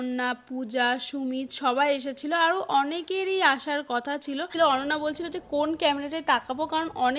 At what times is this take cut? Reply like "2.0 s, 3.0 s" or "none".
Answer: 4.5 s